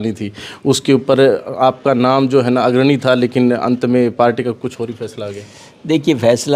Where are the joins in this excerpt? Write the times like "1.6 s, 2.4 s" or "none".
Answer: none